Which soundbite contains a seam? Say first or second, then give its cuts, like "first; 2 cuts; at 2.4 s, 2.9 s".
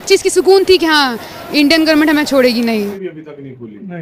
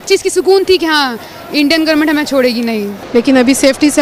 first; 1 cut; at 3.0 s